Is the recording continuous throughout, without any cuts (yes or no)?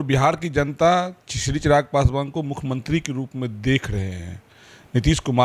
yes